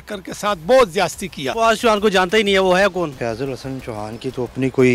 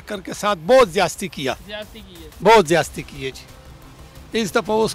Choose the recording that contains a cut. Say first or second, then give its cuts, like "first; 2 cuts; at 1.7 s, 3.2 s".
first; 2 cuts; at 1.5 s, 3.1 s